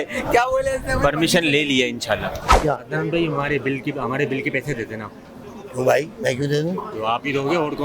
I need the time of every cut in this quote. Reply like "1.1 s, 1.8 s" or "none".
2.5 s

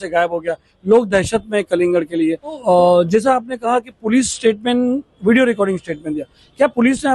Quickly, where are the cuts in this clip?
2.6 s

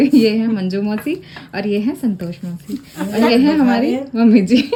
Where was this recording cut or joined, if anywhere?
none

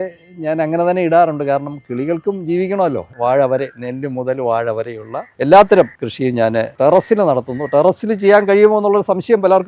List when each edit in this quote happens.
3.1 s, 6.0 s

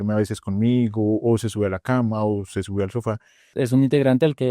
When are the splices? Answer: 3.5 s

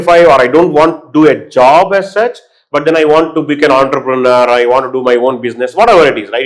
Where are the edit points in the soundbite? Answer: none

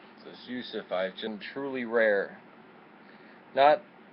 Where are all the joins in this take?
none

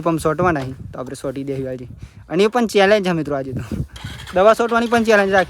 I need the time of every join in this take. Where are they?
none

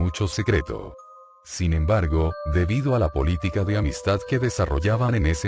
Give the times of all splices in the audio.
1.1 s

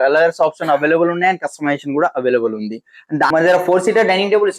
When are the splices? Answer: 3.3 s

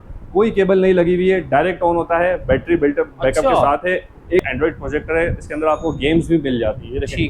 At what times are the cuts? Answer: 4.5 s

